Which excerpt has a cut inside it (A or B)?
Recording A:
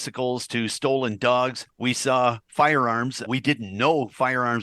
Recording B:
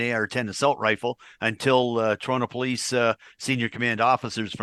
A